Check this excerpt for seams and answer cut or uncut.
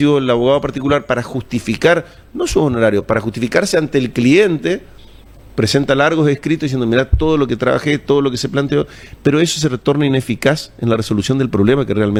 uncut